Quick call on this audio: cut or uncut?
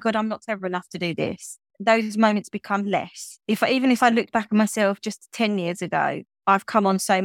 cut